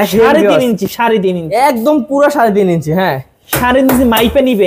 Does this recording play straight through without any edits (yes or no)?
yes